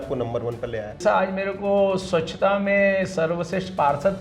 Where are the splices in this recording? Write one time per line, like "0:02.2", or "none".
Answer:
0:01.0